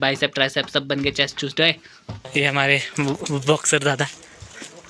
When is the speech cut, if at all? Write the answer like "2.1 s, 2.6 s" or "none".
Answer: 2.1 s